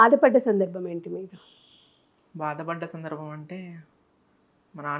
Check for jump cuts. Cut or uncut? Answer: uncut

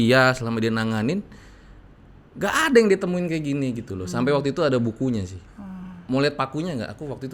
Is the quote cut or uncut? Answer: uncut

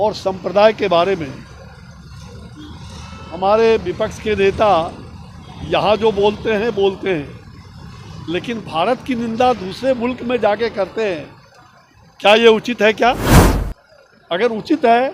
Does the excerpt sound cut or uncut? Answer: uncut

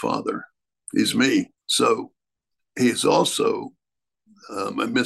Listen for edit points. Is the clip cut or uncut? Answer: uncut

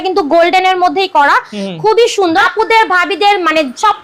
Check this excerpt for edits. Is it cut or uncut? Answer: cut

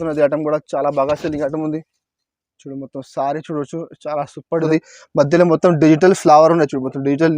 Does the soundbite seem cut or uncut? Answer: cut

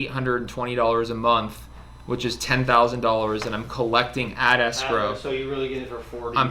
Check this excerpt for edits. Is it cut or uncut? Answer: uncut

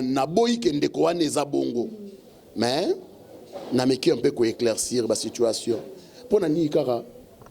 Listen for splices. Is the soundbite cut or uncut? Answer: uncut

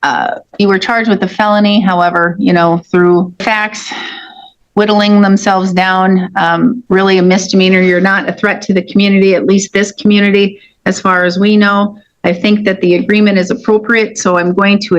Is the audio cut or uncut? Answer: cut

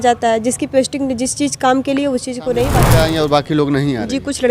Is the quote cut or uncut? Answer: cut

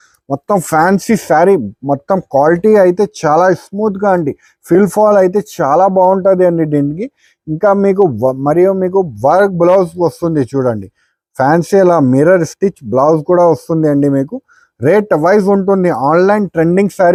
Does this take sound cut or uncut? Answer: uncut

